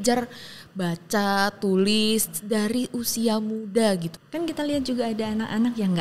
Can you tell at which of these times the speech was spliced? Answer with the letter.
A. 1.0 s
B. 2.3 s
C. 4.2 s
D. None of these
C